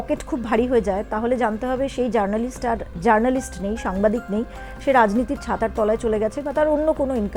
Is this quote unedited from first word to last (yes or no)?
yes